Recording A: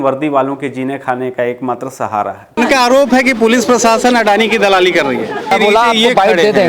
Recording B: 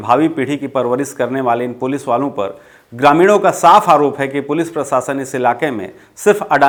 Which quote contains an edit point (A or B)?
A